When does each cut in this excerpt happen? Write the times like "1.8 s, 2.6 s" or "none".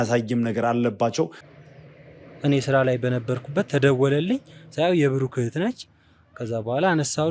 1.4 s